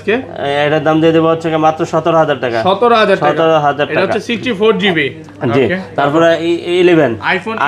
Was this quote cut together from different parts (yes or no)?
no